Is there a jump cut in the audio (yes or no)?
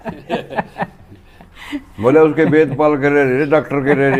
no